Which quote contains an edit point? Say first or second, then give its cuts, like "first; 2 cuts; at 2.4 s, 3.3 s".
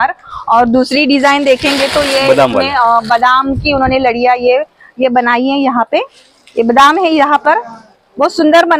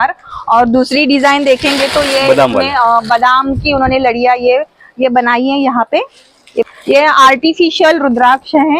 second; 1 cut; at 6.6 s